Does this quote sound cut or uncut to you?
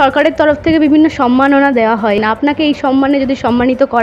cut